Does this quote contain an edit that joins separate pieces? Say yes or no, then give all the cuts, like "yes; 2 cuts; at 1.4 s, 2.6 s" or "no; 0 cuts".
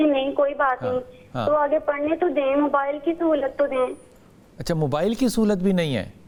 no; 0 cuts